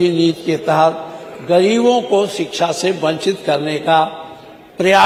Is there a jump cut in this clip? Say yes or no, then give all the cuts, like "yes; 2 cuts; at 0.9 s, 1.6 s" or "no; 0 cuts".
no; 0 cuts